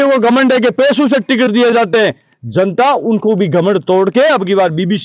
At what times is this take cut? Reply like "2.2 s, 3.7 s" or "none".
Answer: none